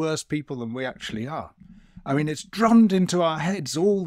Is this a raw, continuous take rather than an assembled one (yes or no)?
yes